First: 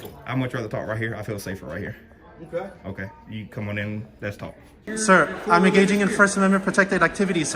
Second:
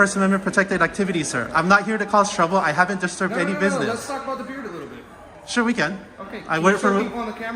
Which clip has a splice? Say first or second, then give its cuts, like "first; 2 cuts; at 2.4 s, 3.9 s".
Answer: first; 1 cut; at 4.9 s